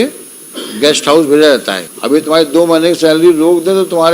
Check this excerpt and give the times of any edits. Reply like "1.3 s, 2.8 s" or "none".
1.9 s